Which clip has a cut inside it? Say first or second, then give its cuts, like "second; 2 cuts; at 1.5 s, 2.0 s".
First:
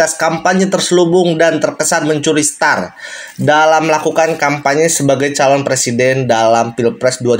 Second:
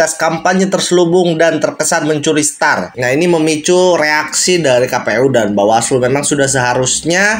second; 1 cut; at 2.9 s